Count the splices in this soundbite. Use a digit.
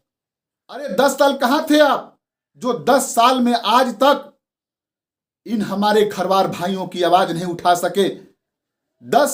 0